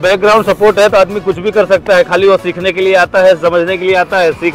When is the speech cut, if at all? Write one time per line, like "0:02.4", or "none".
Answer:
none